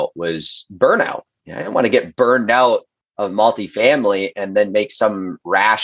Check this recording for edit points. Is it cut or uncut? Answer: uncut